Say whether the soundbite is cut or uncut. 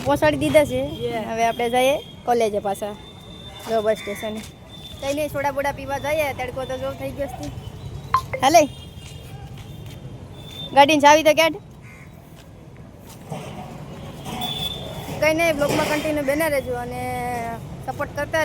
uncut